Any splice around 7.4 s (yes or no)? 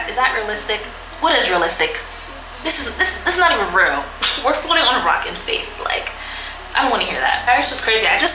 yes